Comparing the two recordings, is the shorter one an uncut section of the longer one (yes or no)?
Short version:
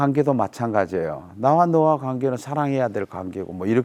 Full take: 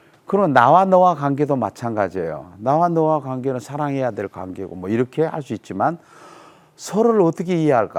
yes